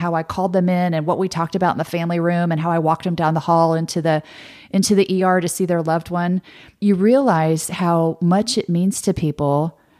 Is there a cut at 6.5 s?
no; 0 cuts

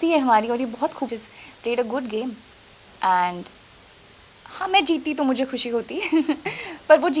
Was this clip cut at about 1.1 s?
yes; 1 cut; at 1.1 s

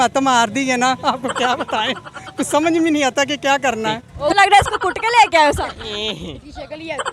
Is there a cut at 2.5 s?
no; 1 cut; at 4.3 s

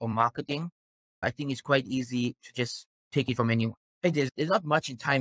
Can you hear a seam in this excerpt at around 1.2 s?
yes; 2 cuts; at 1.2 s, 4.3 s

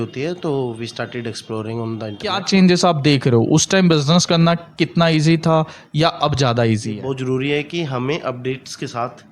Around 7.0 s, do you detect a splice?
yes; 2 cuts; at 2.4 s, 7.0 s

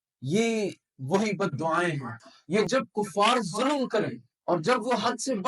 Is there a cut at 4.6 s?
no; 1 cut; at 2.6 s

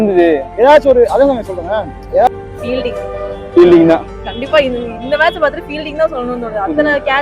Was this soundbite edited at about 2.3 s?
yes; 1 cut; at 2.3 s

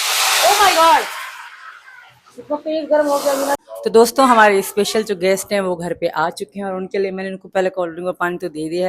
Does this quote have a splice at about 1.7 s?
no; 1 cut; at 3.6 s

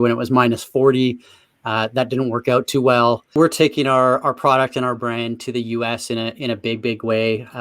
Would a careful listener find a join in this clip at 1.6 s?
no; 1 cut; at 3.4 s

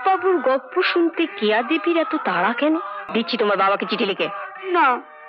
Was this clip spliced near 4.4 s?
no; 1 cut; at 3.0 s

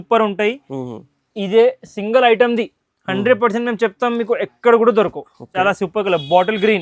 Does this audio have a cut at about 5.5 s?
yes; 1 cut; at 5.5 s

